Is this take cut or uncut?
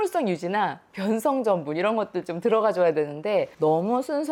uncut